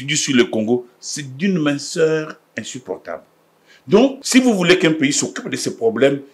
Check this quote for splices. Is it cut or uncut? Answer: cut